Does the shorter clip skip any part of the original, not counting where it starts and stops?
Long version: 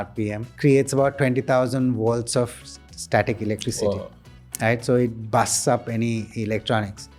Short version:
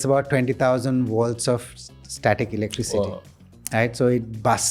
no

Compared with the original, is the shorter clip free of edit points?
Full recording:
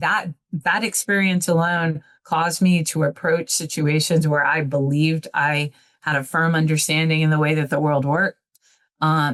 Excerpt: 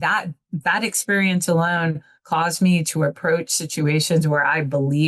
yes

